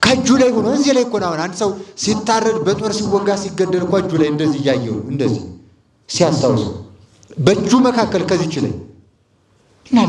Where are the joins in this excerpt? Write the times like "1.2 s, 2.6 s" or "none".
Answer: none